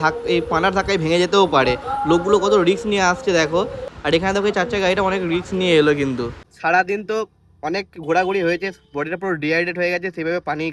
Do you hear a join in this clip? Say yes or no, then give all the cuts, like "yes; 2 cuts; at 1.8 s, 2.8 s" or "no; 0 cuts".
yes; 1 cut; at 6.4 s